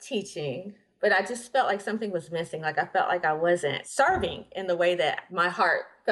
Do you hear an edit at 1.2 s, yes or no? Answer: no